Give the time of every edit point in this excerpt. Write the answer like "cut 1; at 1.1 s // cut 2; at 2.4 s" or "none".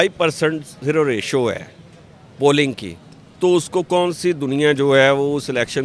none